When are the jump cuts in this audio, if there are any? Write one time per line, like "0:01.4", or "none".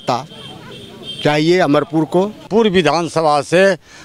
0:02.4